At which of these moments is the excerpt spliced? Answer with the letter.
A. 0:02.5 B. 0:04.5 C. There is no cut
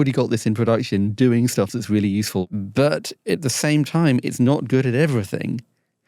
A